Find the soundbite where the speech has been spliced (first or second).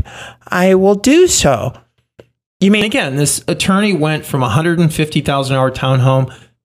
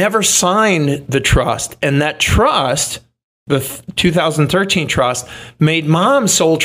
first